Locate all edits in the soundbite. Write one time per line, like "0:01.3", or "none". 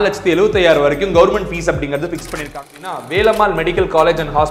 0:02.8

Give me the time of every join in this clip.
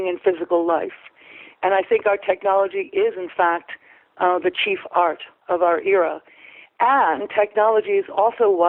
none

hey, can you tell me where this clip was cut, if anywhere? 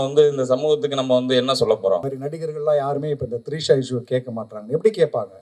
0:02.1

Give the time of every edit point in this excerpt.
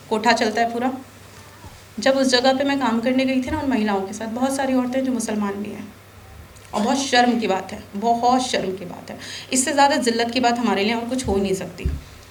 none

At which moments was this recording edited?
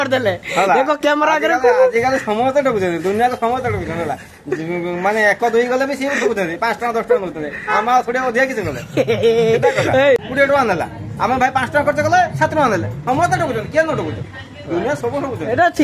0:04.7
0:10.2

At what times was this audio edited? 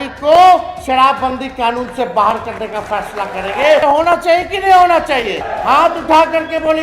0:03.8
0:05.5

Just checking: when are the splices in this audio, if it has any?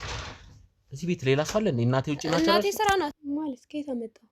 0:03.2

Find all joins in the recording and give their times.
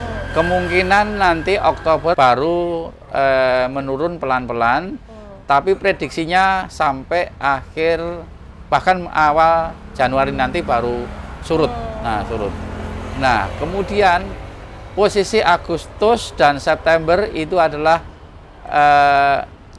0:02.1

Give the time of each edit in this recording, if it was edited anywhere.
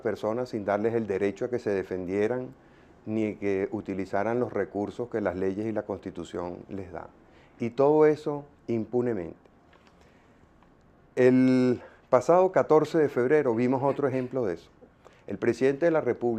0:07.2

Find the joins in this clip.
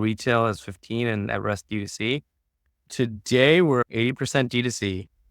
0:03.8

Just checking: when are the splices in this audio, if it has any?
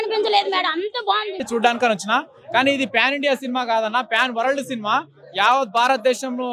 none

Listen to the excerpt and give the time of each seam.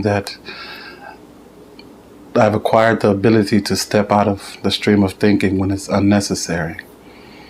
none

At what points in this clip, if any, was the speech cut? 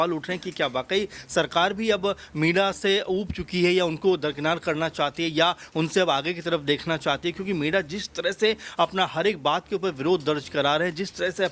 none

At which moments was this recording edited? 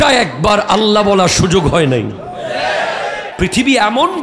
0:03.3

